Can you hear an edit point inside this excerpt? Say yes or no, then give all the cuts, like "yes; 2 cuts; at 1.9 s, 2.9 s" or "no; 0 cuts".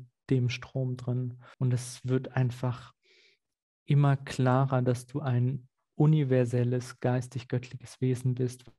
yes; 1 cut; at 1.4 s